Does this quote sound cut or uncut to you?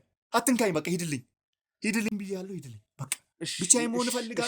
uncut